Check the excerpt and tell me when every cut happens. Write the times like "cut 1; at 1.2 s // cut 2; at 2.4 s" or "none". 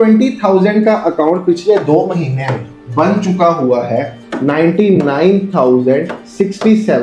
none